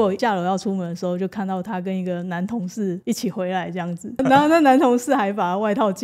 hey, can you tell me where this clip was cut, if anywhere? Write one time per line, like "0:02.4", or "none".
0:03.0
0:04.2